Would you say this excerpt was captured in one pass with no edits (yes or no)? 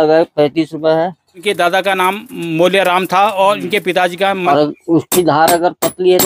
no